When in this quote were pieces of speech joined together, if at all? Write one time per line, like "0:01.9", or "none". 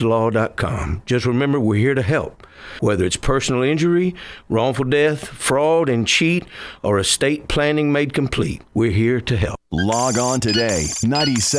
0:09.6